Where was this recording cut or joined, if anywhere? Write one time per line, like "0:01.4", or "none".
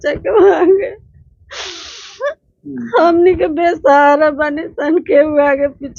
none